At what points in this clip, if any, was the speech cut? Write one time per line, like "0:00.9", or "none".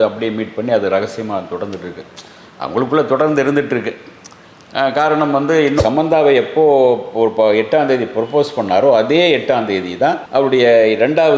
0:05.8